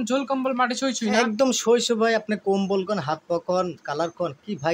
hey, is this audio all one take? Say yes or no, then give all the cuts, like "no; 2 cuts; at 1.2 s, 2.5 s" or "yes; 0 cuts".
yes; 0 cuts